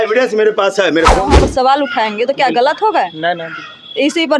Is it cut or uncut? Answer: cut